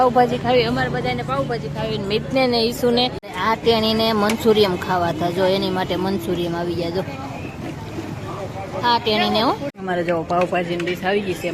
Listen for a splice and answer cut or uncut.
cut